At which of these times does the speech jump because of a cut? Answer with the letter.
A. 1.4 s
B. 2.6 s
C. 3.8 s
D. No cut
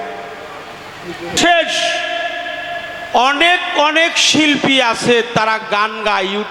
A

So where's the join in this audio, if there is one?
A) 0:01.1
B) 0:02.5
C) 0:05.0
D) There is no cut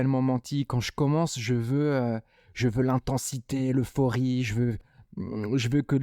C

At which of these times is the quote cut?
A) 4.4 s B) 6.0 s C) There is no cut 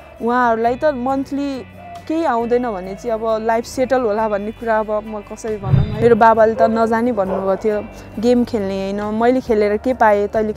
B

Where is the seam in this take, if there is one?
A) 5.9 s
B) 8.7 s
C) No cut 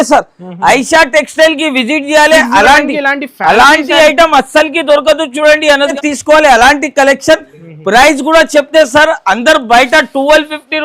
A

